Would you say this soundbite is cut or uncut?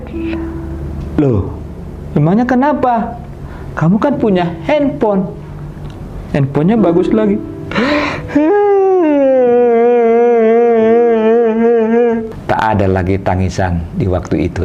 cut